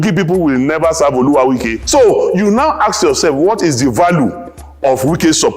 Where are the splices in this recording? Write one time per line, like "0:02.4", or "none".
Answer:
0:01.8